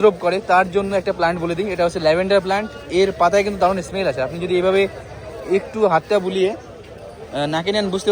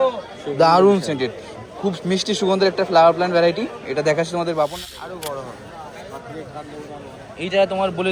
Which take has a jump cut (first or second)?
second